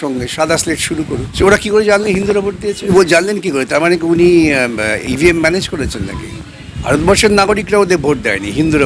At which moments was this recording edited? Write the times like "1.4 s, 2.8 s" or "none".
1.3 s, 2.9 s, 6.7 s

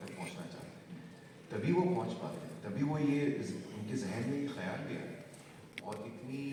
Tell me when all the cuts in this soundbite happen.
none

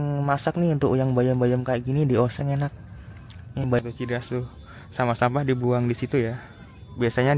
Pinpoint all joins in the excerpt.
3.8 s

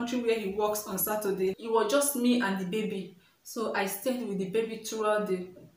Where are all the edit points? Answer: 1.6 s

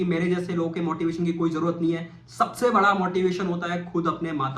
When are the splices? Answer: none

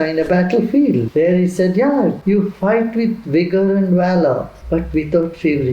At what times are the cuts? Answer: 1.1 s, 2.2 s, 4.5 s

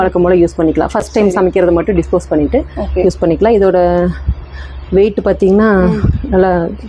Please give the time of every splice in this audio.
none

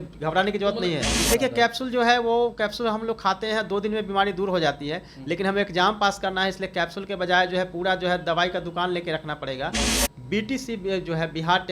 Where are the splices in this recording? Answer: 1.1 s, 9.9 s

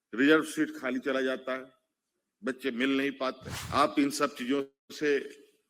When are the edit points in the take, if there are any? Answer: 3.5 s

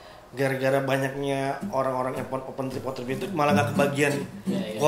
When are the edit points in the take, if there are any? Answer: none

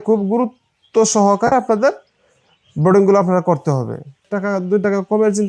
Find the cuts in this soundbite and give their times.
4.3 s

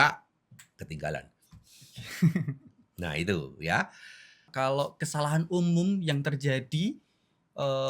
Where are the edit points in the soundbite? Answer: 4.5 s

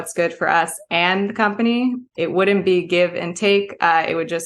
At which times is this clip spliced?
2.1 s

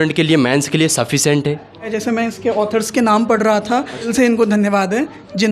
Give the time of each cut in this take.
1.9 s, 4.1 s

